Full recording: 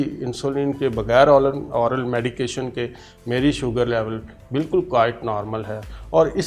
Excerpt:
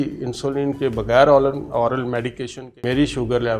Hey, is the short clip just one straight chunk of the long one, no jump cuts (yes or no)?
no